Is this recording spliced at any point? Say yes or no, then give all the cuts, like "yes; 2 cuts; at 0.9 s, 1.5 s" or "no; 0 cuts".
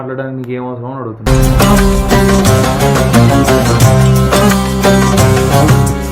no; 0 cuts